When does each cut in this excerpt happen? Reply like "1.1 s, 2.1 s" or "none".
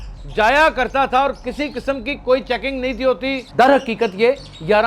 3.4 s